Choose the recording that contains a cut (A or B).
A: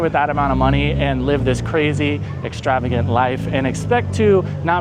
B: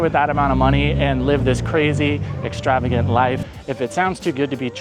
B